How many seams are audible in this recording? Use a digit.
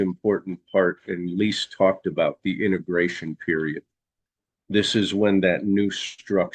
0